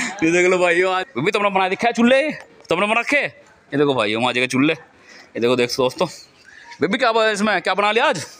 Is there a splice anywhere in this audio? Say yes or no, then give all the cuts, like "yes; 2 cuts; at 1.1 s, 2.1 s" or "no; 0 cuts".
yes; 1 cut; at 1.0 s